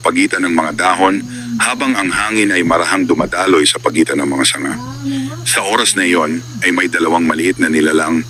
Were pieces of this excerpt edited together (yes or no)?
no